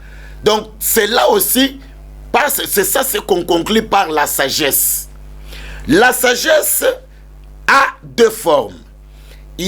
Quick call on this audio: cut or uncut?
uncut